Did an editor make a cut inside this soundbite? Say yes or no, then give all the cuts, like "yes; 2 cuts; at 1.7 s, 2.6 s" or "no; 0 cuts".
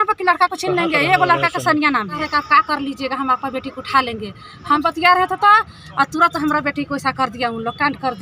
yes; 2 cuts; at 2.2 s, 4.8 s